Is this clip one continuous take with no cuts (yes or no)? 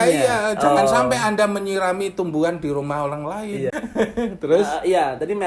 no